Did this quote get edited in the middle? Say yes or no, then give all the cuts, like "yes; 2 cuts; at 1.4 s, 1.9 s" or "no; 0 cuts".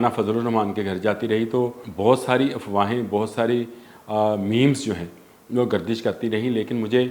yes; 1 cut; at 1.8 s